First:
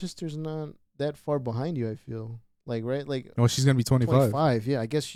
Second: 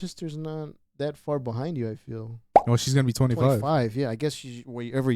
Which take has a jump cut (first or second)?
second